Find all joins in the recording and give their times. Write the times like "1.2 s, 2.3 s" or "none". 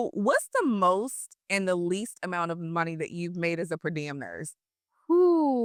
none

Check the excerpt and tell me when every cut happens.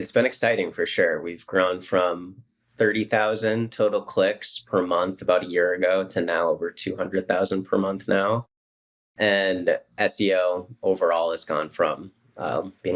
none

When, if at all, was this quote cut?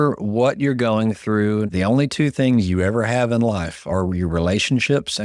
1.7 s

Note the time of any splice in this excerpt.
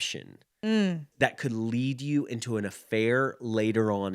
1.1 s

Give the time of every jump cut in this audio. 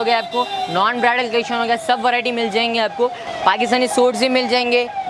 3.2 s

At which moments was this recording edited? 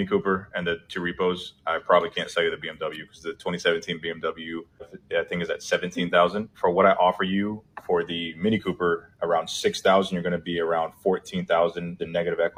none

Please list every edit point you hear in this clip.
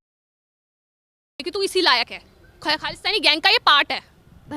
none

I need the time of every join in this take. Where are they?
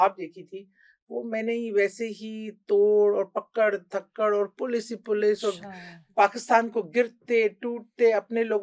none

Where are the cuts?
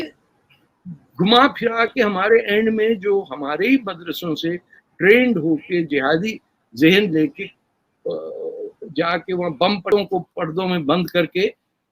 9.8 s

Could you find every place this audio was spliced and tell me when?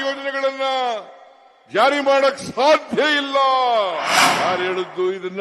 4.2 s

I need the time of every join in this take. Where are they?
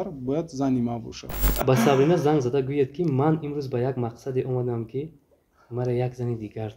1.5 s

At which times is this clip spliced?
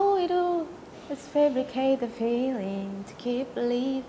none

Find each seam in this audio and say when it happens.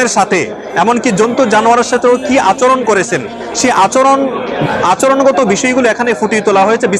none

